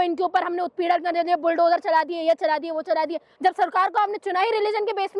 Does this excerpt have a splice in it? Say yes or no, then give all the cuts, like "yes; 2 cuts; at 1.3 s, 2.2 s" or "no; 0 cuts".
yes; 1 cut; at 3.3 s